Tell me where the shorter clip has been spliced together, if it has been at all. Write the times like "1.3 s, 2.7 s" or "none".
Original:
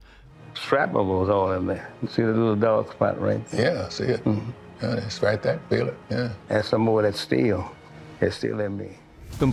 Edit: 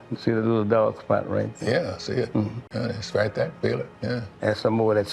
2.6 s